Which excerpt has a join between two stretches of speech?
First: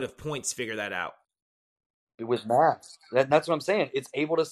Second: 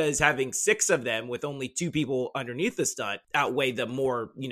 second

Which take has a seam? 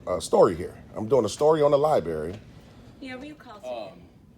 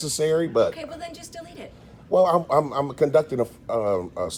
first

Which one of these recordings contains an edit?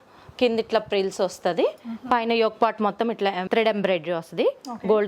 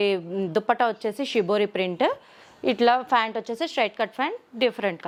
first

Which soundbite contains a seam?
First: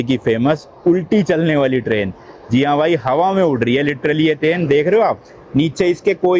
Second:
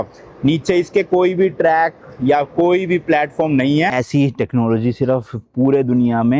second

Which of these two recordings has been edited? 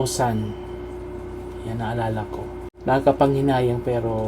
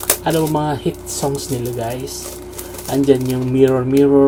first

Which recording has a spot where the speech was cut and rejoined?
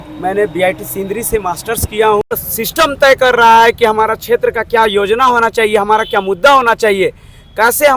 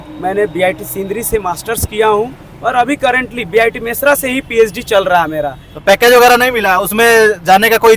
first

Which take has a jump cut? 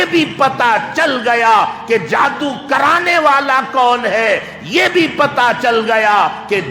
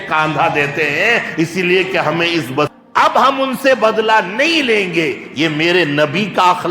second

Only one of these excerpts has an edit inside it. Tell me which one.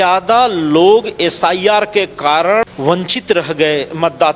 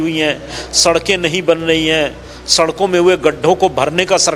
first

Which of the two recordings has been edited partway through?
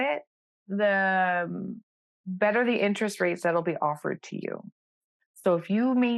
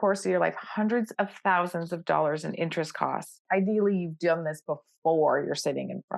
second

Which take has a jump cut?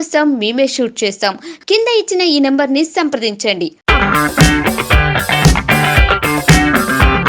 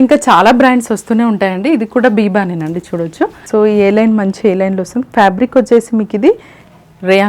second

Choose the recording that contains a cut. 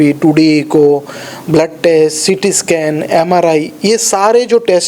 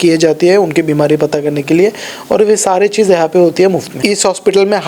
second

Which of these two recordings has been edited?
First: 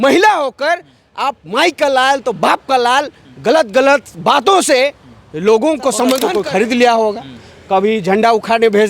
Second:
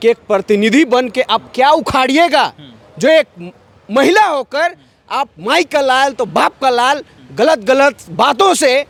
first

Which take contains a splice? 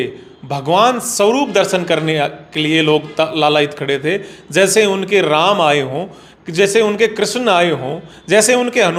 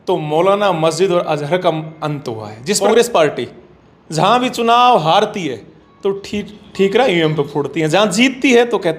second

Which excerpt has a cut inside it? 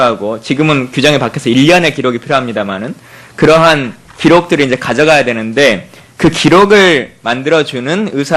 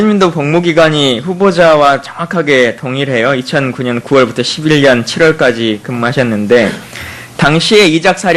first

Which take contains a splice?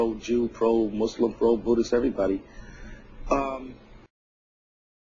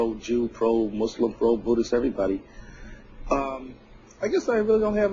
second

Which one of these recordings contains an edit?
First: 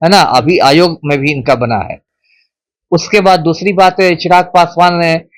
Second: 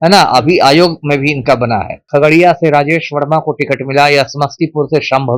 second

